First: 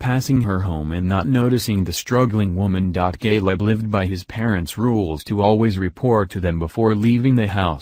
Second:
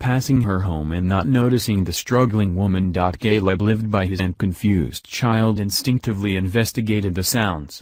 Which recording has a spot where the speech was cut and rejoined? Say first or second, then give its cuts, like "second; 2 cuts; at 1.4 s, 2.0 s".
first; 1 cut; at 4.2 s